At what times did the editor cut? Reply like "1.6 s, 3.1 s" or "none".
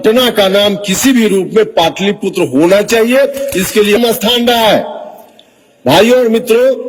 4.0 s